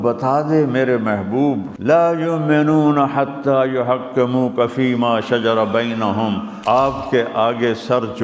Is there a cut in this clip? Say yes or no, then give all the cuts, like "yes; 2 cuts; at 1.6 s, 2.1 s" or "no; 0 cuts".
yes; 2 cuts; at 1.7 s, 6.5 s